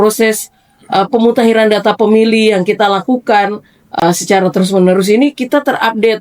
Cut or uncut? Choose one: uncut